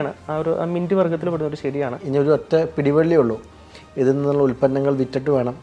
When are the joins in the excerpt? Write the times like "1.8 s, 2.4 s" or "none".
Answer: 2.0 s